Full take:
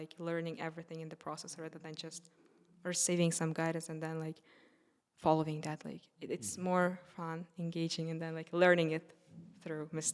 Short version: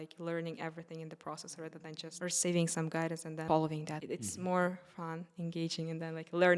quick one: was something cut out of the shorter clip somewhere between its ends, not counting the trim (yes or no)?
yes